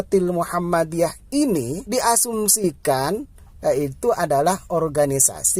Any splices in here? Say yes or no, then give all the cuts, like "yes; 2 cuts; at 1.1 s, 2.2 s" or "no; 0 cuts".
yes; 1 cut; at 1.8 s